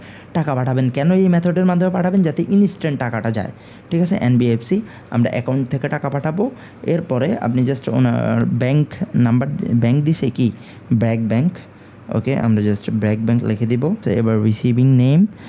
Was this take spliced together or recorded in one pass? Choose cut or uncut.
uncut